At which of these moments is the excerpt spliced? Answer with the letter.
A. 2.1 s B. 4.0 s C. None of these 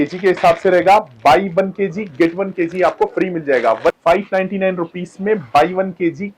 B